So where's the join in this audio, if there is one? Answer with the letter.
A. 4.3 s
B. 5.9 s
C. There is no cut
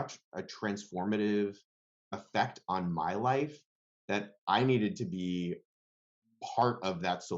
C